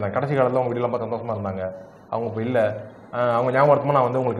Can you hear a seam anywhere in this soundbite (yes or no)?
no